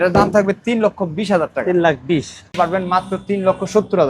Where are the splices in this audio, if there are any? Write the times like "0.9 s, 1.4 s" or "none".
2.5 s

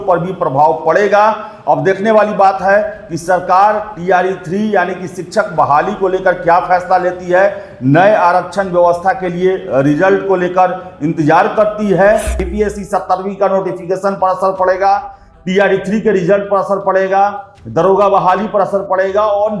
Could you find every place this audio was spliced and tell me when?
12.4 s

